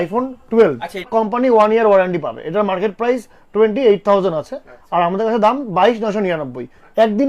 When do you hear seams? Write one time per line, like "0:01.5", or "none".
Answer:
0:01.1